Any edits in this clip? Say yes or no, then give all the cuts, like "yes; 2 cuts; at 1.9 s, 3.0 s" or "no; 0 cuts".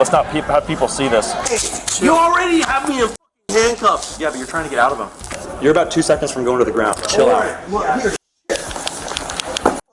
yes; 2 cuts; at 1.4 s, 5.2 s